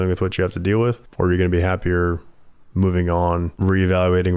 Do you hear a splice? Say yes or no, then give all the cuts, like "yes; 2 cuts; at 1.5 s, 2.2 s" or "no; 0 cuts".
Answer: yes; 2 cuts; at 1.1 s, 3.5 s